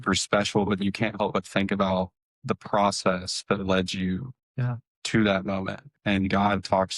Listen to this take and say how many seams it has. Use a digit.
1